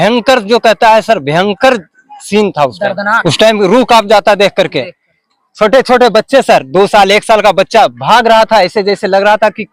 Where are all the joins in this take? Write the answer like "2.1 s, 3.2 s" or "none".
3.2 s